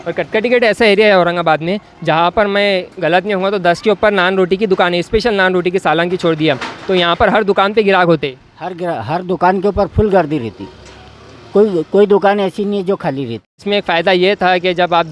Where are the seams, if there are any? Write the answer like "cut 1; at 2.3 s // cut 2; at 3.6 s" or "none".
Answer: cut 1; at 13.6 s